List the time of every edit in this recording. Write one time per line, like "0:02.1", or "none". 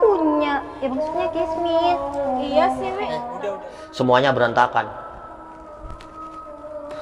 0:03.3